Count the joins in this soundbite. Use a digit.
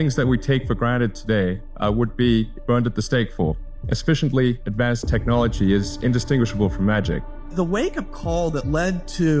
5